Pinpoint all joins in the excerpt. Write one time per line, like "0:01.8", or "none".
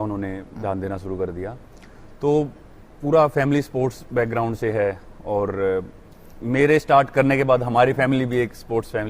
none